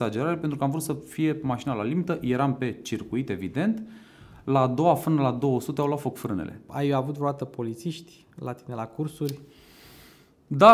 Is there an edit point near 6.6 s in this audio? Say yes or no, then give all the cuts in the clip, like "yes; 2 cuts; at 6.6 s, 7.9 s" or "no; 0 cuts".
yes; 1 cut; at 6.6 s